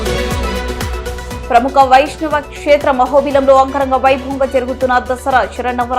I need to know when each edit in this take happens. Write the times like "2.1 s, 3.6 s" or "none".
1.2 s